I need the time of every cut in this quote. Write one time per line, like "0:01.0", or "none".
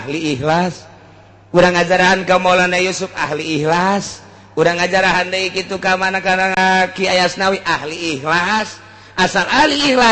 0:06.6